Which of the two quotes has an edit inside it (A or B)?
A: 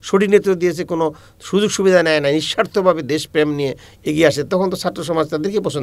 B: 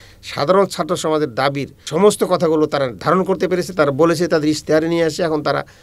B